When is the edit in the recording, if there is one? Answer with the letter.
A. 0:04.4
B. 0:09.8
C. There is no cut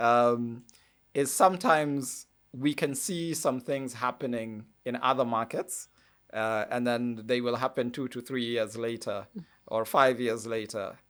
C